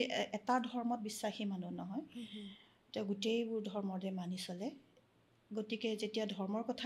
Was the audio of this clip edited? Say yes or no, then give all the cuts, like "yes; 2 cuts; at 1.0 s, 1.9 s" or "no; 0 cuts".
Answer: no; 0 cuts